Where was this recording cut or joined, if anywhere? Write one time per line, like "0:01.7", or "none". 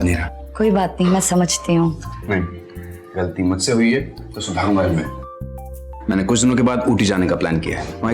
none